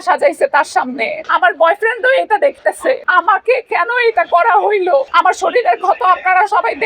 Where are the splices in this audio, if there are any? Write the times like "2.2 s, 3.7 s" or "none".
1.2 s, 3.0 s, 5.1 s